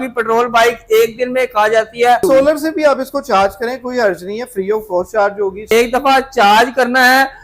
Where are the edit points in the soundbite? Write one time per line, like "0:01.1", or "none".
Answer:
0:02.2
0:05.7

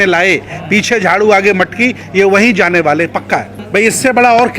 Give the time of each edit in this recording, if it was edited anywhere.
0:03.6

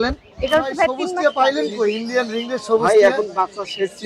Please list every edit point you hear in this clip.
0:01.1

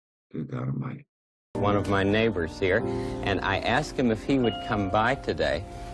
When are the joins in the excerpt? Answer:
0:01.5

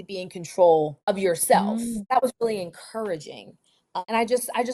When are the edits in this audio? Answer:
0:01.1
0:02.0
0:04.0

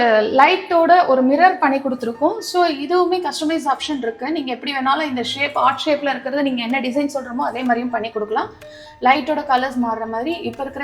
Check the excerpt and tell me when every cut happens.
none

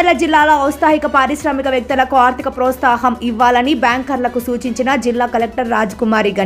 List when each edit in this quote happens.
none

